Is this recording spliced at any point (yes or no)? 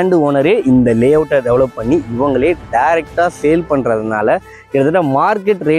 no